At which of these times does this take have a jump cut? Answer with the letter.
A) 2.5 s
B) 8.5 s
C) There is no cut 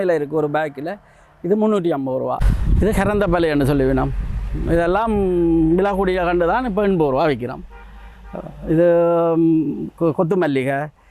A